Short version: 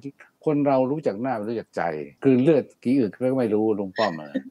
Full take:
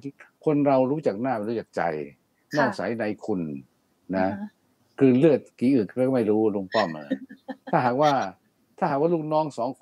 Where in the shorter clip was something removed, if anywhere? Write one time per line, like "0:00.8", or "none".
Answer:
0:02.1